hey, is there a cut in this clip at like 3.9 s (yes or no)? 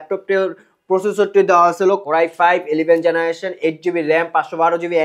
no